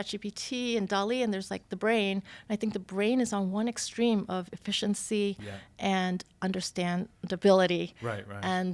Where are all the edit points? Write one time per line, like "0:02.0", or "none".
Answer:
none